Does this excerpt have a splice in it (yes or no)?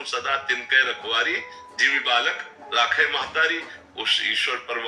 yes